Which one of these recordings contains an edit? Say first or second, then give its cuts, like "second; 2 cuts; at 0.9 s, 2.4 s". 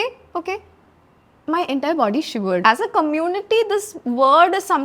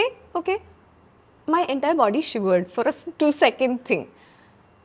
first; 1 cut; at 2.6 s